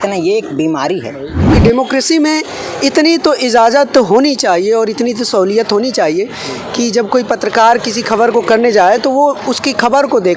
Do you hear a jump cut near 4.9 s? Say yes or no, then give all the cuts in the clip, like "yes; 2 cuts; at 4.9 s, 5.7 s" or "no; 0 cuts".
no; 1 cut; at 1.5 s